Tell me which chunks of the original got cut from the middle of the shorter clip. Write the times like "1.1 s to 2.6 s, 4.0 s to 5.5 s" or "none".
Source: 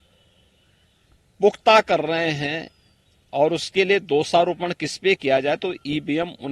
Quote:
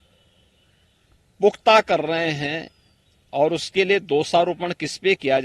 none